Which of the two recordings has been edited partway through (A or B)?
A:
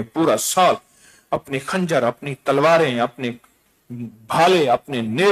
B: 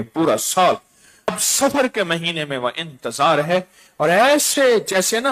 B